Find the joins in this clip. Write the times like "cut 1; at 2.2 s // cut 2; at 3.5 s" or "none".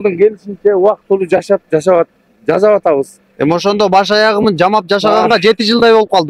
none